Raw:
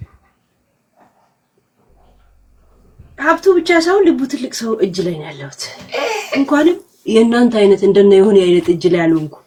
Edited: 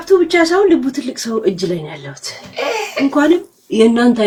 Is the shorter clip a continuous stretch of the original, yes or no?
yes